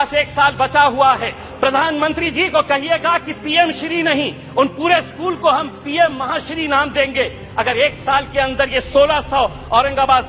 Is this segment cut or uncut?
cut